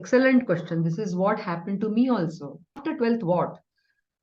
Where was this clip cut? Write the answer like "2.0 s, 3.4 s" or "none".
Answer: 2.8 s

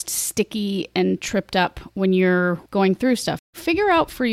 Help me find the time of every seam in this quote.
2.6 s, 3.5 s

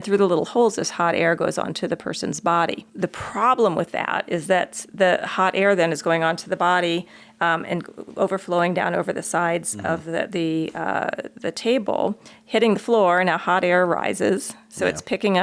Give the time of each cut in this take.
2.9 s

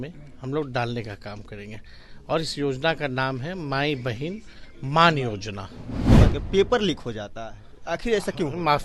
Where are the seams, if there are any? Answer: 6.0 s

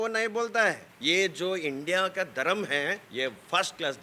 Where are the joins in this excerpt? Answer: 0.9 s, 3.0 s

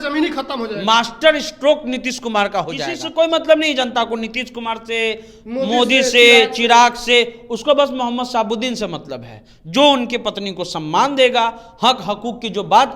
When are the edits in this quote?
3.0 s

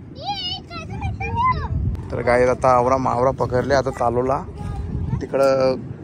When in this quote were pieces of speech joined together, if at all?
2.0 s

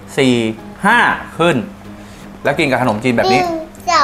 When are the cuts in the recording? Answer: none

